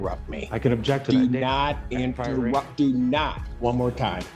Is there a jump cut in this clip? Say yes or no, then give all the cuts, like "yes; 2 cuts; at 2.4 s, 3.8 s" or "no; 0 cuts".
yes; 1 cut; at 3.4 s